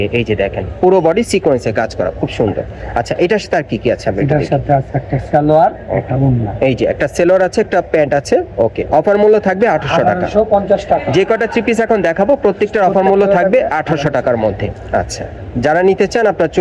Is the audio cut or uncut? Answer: uncut